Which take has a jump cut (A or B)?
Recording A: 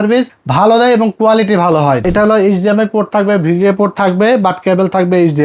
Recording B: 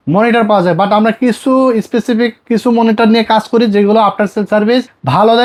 A